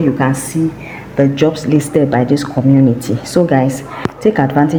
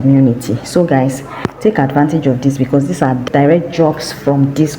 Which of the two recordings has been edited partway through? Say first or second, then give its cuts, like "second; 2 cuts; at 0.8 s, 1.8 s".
second; 1 cut; at 3.2 s